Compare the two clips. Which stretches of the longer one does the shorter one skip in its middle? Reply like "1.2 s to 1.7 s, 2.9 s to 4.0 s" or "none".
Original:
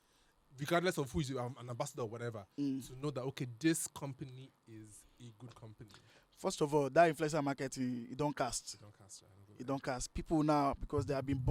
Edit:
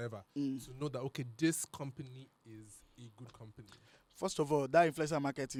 none